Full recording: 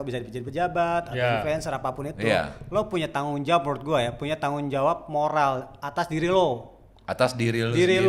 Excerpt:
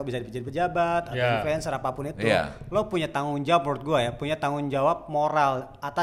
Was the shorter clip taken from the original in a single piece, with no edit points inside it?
yes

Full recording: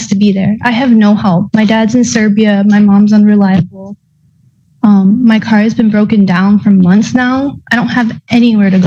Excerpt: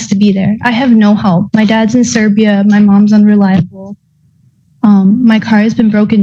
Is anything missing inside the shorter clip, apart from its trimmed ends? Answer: no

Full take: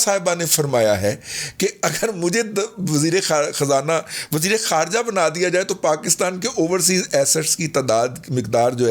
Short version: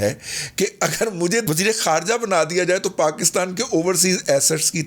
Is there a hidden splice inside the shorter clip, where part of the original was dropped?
yes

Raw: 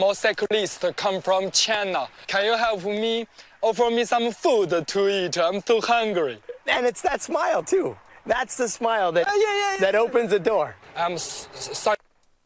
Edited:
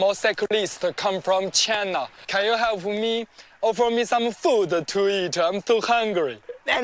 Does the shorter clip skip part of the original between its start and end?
no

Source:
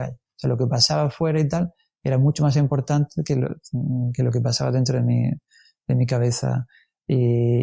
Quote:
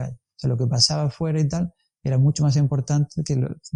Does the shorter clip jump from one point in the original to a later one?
no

